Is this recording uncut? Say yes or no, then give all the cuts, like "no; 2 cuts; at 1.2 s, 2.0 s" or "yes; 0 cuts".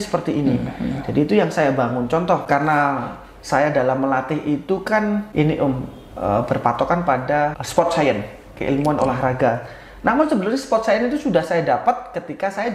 no; 3 cuts; at 2.4 s, 5.3 s, 7.6 s